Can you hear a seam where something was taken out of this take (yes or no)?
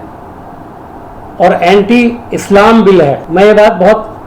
no